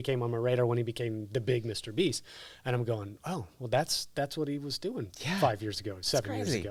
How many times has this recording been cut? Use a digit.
0